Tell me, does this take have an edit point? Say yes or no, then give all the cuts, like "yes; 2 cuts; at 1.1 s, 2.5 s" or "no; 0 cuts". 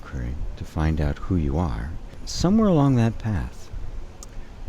yes; 1 cut; at 2.2 s